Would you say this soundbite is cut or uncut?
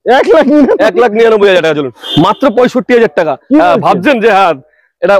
cut